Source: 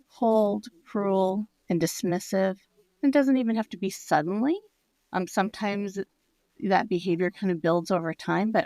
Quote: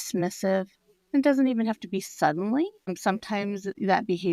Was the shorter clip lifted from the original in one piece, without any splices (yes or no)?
no